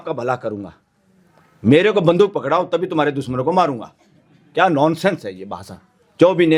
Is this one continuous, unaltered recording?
yes; 0 cuts

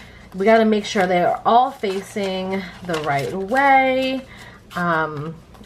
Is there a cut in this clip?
no; 0 cuts

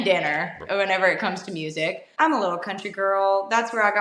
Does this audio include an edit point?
yes; 1 cut; at 2.0 s

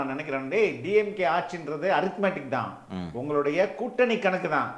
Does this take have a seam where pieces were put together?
no; 0 cuts

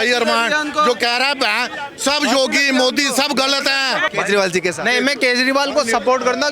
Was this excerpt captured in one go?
no; 1 cut; at 4.1 s

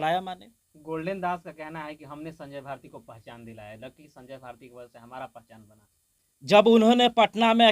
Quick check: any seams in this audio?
yes; 1 cut; at 6.6 s

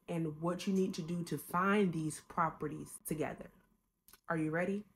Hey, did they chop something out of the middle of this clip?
yes; 1 cut; at 2.9 s

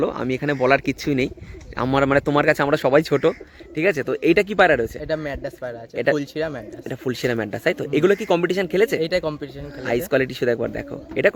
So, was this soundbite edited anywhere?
no; 0 cuts

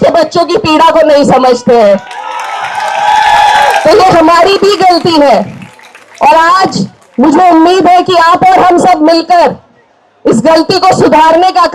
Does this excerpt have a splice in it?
no; 0 cuts

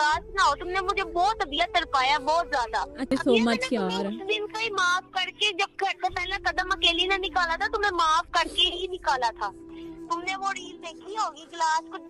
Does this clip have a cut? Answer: yes; 2 cuts; at 3.1 s, 9.6 s

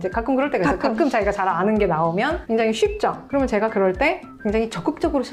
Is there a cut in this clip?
no; 0 cuts

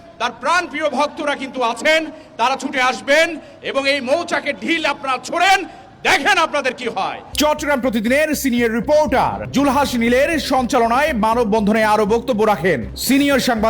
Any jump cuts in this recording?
no; 0 cuts

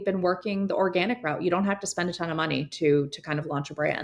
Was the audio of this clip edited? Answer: no; 0 cuts

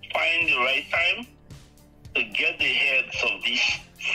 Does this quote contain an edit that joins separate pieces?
no; 0 cuts

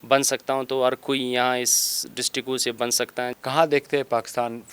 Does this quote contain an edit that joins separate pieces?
yes; 1 cut; at 3.3 s

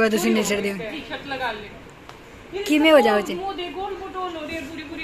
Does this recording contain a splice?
no; 0 cuts

